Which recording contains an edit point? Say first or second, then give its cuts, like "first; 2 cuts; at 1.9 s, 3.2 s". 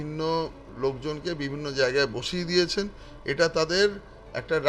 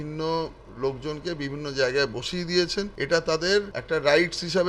second; 2 cuts; at 3.0 s, 3.8 s